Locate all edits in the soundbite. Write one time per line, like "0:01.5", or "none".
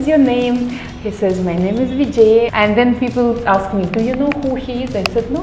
0:02.5